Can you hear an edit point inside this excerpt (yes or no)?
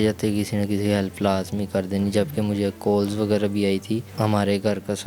yes